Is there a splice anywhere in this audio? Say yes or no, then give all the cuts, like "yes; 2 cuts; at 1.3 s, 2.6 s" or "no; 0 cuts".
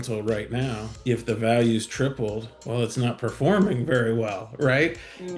yes; 2 cuts; at 0.9 s, 2.5 s